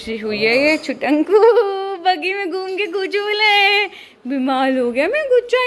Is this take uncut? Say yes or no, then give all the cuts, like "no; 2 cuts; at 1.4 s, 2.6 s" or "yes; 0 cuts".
yes; 0 cuts